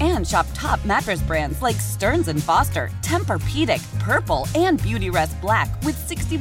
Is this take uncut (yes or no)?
yes